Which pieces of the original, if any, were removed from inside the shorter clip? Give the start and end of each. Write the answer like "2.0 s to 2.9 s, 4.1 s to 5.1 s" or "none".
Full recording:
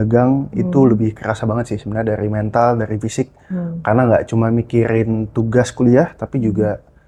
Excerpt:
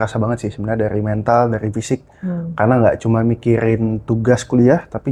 none